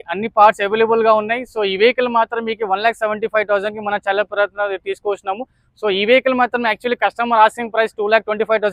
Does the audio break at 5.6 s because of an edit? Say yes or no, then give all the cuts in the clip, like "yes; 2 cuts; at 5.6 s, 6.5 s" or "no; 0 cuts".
no; 0 cuts